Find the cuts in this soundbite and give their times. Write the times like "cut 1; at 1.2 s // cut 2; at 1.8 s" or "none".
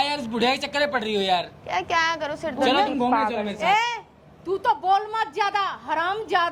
none